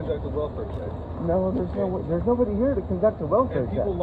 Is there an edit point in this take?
no; 0 cuts

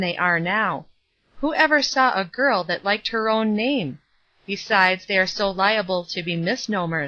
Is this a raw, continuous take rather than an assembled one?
yes; 0 cuts

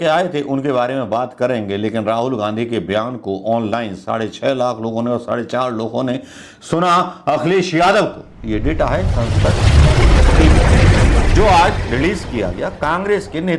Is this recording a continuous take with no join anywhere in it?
yes; 0 cuts

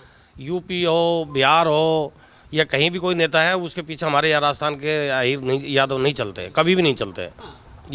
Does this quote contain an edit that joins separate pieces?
no; 0 cuts

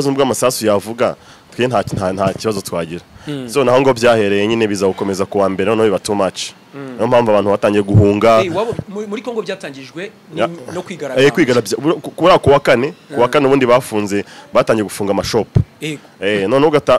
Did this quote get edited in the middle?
no; 0 cuts

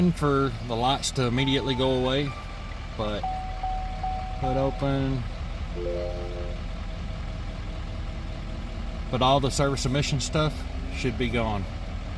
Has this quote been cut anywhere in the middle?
no; 0 cuts

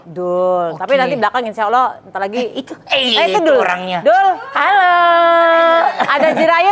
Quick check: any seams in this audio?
no; 0 cuts

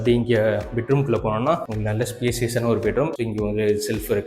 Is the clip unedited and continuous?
no; 1 cut; at 3.1 s

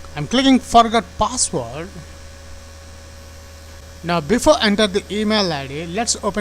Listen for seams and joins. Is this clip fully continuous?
no; 1 cut; at 3.8 s

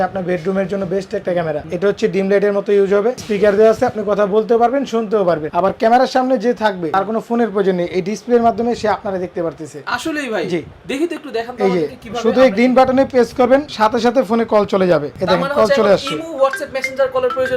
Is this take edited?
yes; 6 cuts; at 1.7 s, 3.2 s, 5.5 s, 6.8 s, 13.7 s, 15.1 s

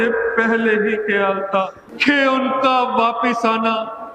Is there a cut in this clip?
yes; 1 cut; at 1.8 s

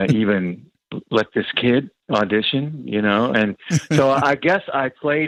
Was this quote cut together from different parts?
no; 0 cuts

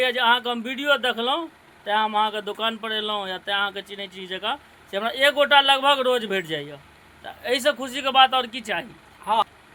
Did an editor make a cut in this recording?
no; 0 cuts

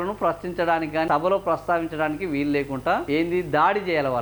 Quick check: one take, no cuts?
no; 2 cuts; at 1.1 s, 3.0 s

